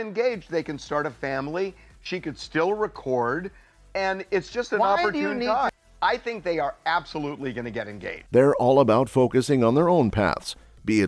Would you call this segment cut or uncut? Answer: uncut